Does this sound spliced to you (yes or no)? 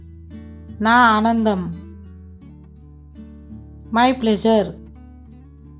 no